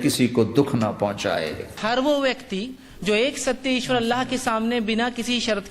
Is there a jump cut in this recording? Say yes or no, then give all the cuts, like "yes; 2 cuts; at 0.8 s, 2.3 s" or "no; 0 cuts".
yes; 1 cut; at 1.8 s